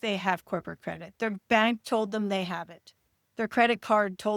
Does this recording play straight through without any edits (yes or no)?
yes